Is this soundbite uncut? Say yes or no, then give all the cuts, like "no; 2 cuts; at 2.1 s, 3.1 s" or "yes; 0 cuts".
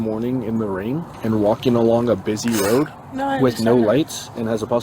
no; 1 cut; at 1.1 s